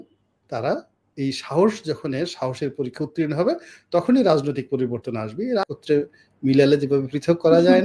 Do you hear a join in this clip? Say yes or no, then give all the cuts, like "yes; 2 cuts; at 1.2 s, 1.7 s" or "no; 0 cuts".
yes; 1 cut; at 5.7 s